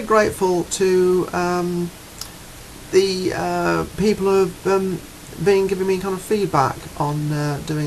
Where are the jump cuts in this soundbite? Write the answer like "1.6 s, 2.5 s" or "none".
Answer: 3.1 s